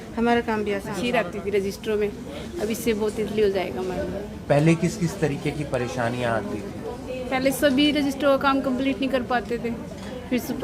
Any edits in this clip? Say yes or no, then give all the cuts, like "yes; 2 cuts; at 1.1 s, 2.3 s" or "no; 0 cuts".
yes; 1 cut; at 1.0 s